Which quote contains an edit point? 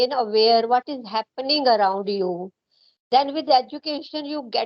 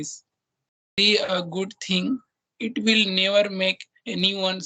second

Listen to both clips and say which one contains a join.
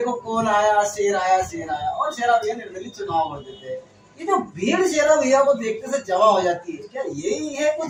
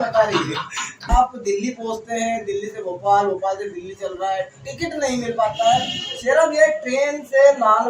second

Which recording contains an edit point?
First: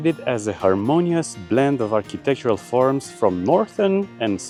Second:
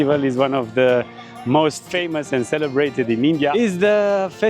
second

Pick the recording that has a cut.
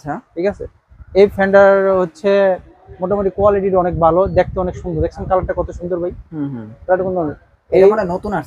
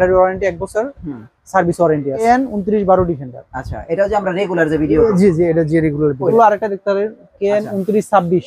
second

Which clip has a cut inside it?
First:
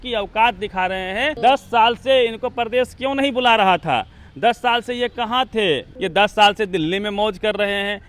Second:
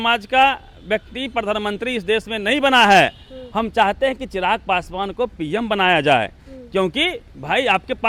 first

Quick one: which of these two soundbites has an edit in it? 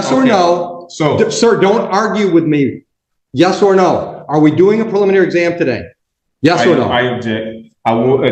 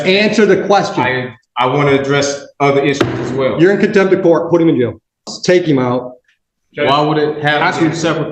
second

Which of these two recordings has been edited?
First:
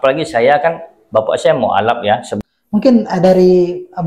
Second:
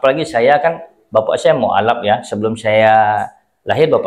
first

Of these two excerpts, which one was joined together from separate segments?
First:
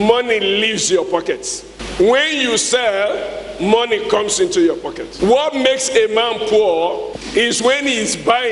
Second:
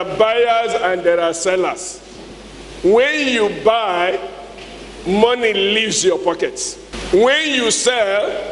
first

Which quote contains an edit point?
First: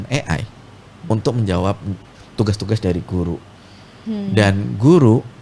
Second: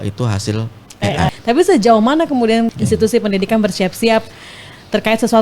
second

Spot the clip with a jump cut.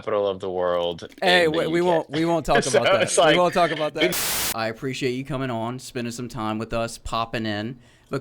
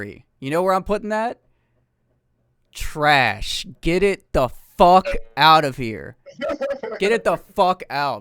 first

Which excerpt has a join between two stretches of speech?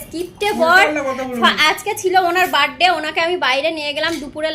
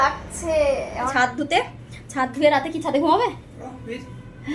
second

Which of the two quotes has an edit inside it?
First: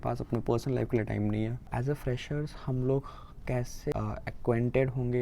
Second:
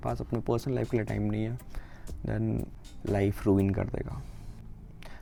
first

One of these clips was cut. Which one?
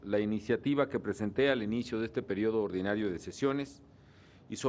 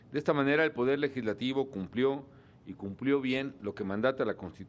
second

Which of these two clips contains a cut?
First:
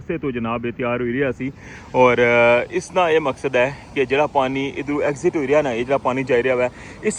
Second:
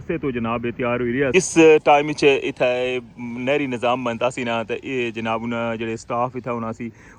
second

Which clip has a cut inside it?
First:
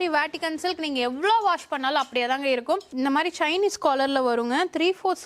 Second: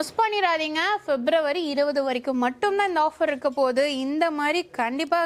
first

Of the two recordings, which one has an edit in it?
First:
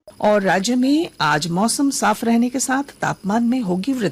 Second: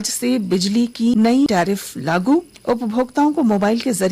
second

